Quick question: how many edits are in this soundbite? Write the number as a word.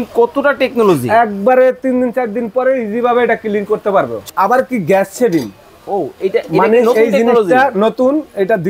one